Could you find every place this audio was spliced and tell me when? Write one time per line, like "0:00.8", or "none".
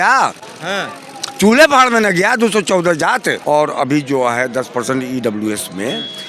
0:03.4